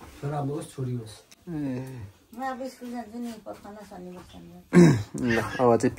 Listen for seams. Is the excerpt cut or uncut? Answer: uncut